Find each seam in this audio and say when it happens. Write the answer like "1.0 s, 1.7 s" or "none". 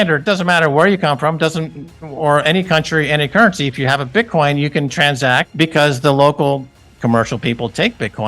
5.5 s

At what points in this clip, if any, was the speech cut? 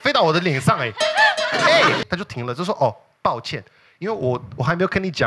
2.0 s

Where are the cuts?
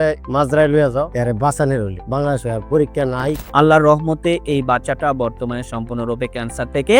1.1 s, 3.4 s

